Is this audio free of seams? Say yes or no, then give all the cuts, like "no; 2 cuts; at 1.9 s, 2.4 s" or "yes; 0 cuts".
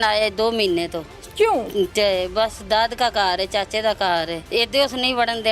no; 1 cut; at 4.4 s